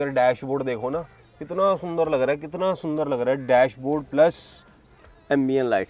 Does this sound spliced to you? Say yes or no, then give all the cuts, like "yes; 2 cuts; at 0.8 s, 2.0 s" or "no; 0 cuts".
no; 0 cuts